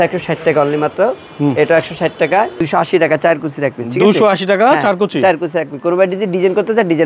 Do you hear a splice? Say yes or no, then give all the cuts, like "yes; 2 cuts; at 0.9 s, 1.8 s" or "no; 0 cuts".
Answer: yes; 1 cut; at 2.6 s